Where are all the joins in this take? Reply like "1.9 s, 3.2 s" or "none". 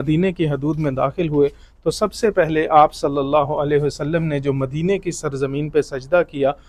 none